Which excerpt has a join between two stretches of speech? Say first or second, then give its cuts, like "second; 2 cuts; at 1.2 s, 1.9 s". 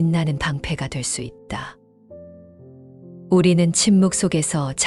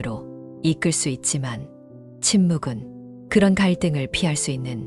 first; 2 cuts; at 1.7 s, 3.1 s